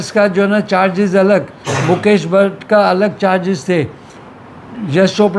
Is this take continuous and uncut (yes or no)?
yes